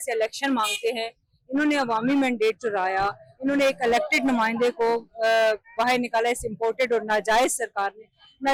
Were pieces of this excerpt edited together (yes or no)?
no